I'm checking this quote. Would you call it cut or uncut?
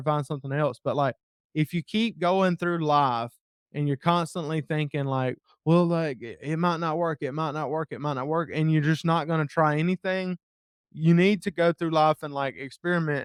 uncut